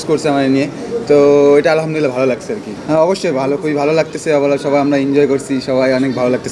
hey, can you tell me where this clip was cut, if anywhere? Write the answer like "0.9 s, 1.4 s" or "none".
none

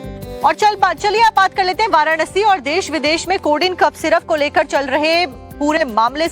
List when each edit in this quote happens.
1.7 s

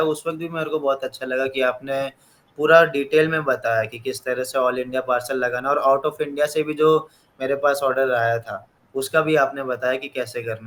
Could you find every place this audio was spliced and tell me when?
none

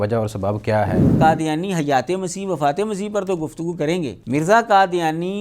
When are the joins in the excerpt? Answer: 1.1 s, 4.2 s

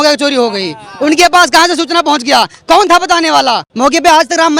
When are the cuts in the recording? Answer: 3.7 s

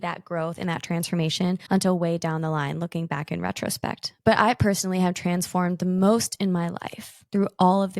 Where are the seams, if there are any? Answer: 4.1 s

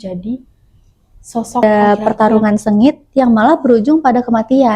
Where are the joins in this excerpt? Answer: 1.6 s

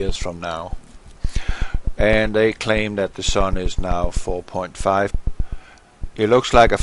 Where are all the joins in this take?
none

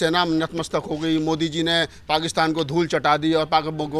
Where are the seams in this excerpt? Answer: none

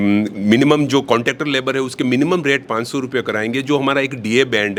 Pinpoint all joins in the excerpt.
none

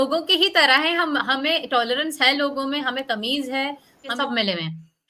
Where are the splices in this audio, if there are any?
4.1 s

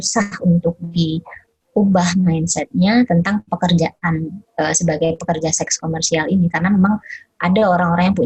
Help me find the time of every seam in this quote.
none

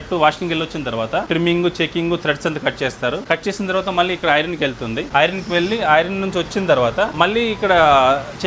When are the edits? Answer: 1.3 s, 3.2 s, 5.1 s, 7.1 s

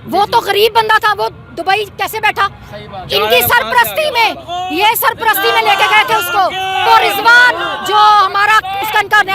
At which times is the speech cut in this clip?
6.9 s

